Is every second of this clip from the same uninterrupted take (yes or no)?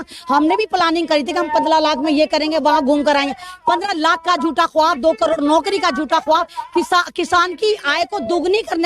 yes